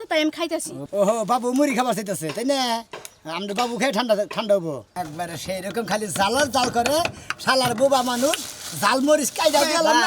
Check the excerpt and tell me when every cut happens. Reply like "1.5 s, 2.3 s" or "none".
4.9 s

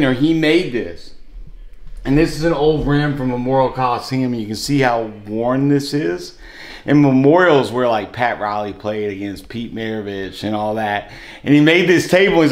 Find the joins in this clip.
none

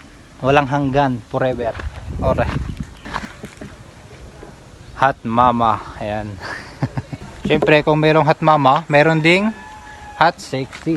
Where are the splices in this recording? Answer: 3.2 s, 7.3 s

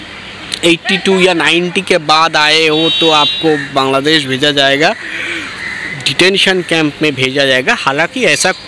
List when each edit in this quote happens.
none

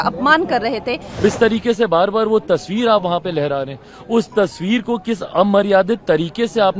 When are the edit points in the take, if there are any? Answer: 1.2 s

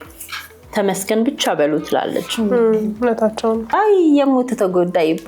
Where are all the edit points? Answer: 3.6 s

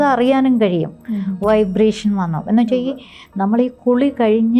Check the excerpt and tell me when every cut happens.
none

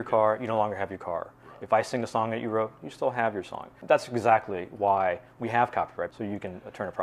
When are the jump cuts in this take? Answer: 3.7 s, 6.1 s

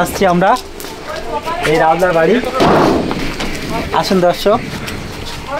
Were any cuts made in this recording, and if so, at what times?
none

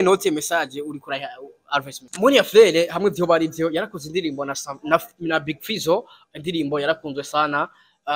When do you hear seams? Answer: 2.0 s

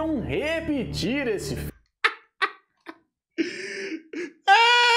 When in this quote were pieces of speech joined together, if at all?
1.9 s

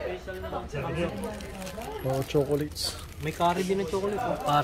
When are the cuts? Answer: 1.1 s

